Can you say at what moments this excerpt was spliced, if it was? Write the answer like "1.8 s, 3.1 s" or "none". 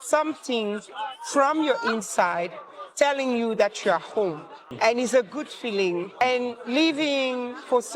4.7 s, 6.2 s